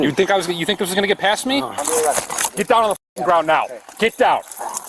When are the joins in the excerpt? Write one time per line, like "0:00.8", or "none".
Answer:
0:01.8